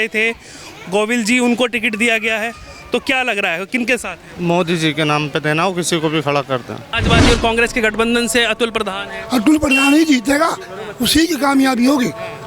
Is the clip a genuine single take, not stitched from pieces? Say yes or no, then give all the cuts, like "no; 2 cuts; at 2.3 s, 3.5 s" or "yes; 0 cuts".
no; 1 cut; at 6.9 s